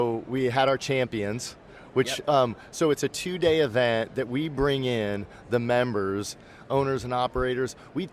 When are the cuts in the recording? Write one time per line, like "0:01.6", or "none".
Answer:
none